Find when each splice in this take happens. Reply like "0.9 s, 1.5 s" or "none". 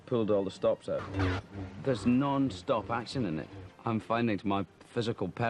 1.1 s